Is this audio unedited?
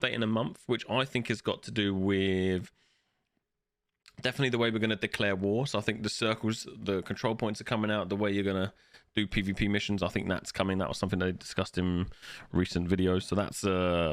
yes; 0 cuts

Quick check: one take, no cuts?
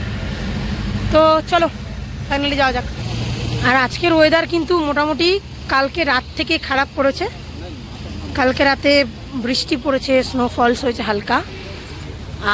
yes; 0 cuts

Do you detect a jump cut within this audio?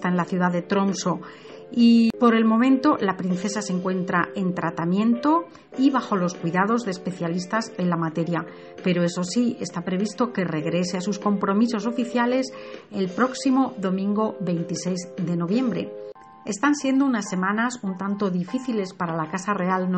yes; 1 cut; at 8.3 s

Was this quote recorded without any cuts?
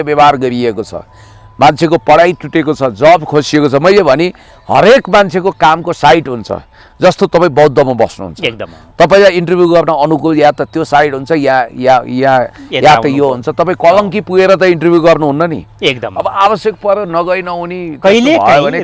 yes; 0 cuts

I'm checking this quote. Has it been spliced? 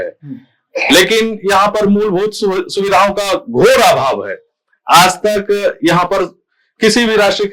no; 0 cuts

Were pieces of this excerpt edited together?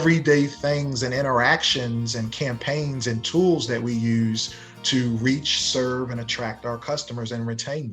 no; 0 cuts

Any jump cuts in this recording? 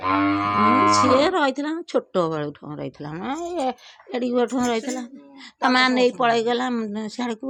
no; 0 cuts

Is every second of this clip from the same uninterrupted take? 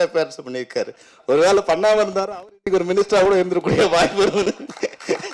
yes; 0 cuts

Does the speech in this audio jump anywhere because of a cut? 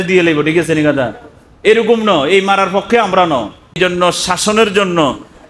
yes; 1 cut; at 3.8 s

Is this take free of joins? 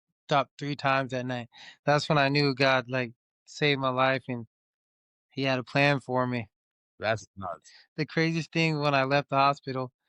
yes; 0 cuts

